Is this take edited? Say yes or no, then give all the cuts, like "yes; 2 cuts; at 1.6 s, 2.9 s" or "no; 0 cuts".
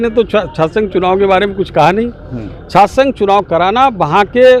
no; 0 cuts